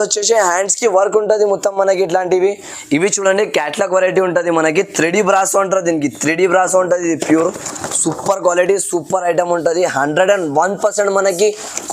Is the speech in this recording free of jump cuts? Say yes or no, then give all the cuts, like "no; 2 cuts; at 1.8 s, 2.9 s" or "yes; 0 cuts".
no; 1 cut; at 2.7 s